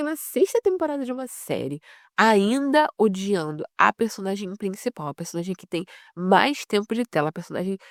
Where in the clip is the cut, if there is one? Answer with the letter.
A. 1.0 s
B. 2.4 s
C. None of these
C